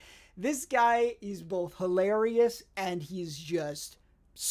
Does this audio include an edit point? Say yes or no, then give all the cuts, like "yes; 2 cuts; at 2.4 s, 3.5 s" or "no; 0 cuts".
no; 0 cuts